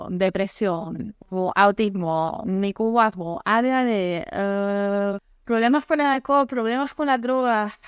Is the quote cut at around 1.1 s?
yes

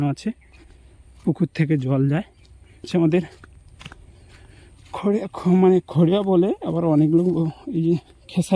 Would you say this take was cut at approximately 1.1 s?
no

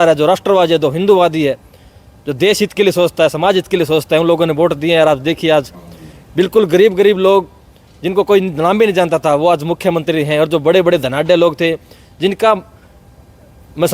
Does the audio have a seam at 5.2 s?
no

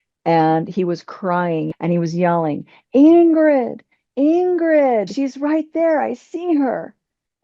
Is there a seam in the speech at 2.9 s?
no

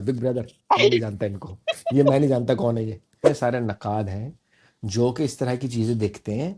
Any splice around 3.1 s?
yes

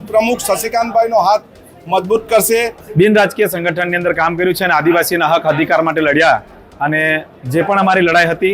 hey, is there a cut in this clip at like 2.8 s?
yes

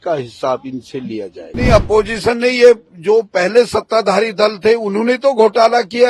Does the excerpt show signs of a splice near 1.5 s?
yes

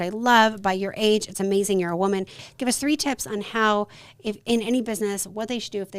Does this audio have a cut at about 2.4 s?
yes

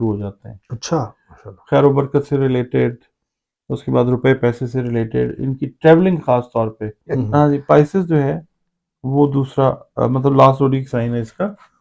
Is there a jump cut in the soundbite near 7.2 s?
yes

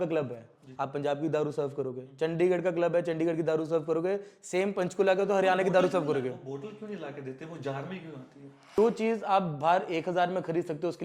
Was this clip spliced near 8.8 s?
yes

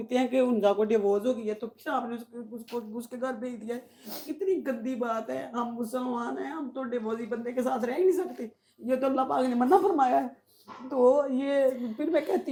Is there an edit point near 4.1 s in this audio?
no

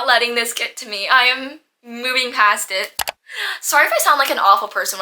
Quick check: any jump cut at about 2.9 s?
yes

